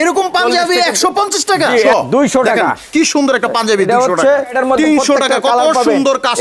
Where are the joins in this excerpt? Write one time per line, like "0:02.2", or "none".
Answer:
0:01.9
0:04.5